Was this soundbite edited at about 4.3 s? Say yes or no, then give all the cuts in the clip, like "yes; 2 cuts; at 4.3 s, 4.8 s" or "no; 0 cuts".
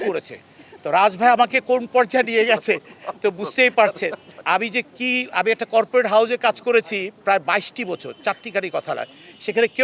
yes; 1 cut; at 4.3 s